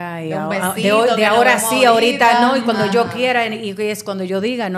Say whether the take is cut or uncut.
uncut